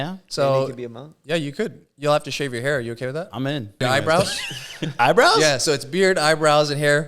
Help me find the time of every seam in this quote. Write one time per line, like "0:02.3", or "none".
0:03.8